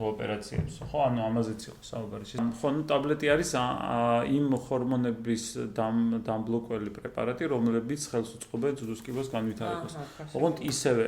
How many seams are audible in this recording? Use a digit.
1